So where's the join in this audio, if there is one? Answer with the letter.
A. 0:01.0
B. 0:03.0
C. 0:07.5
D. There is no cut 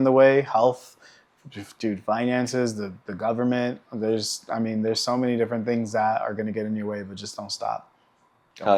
D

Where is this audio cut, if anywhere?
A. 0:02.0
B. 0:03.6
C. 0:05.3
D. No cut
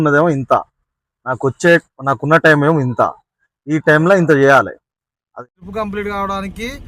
C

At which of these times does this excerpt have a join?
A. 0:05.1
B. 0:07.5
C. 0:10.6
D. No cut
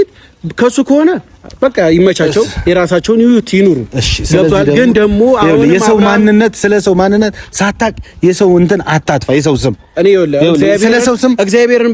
D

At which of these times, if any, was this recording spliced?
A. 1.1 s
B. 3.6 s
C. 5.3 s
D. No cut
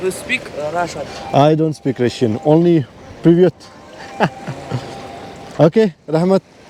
D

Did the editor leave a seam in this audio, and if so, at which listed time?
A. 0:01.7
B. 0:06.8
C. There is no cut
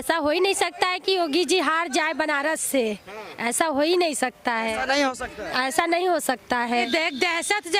B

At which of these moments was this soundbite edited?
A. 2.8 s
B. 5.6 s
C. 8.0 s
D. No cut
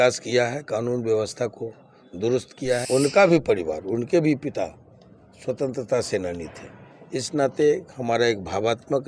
A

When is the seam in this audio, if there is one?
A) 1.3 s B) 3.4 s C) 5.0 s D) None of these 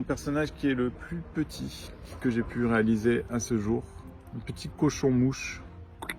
D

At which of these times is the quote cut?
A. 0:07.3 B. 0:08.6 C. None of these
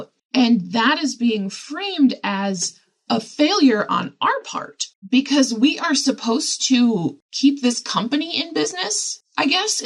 C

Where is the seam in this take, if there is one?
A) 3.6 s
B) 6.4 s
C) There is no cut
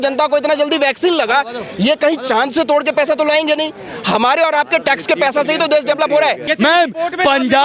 B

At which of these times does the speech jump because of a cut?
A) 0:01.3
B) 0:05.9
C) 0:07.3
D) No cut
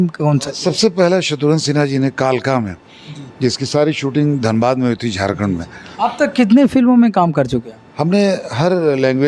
B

